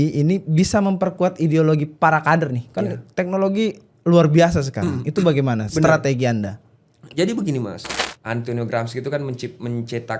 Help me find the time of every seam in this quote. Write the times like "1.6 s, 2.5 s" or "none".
8.0 s